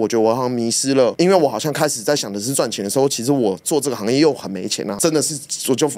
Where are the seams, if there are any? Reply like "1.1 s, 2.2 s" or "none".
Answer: 1.1 s